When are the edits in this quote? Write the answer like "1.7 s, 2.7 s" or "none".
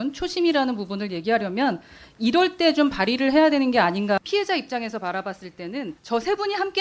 4.2 s, 6.0 s